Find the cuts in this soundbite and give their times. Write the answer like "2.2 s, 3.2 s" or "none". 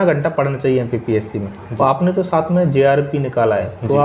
none